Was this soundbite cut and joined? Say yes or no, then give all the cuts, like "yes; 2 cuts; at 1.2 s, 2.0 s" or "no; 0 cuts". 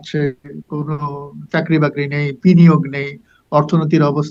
no; 0 cuts